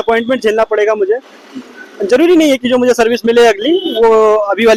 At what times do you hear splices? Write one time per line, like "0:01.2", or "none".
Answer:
none